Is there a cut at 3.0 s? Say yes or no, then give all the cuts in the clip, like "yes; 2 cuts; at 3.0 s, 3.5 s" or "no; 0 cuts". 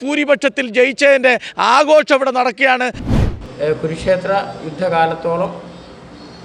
yes; 1 cut; at 3.0 s